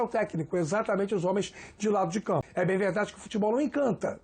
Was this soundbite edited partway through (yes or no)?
yes